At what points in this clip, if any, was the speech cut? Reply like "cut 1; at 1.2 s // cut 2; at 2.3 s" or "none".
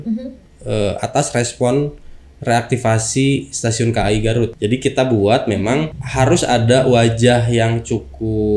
cut 1; at 4.5 s // cut 2; at 6.0 s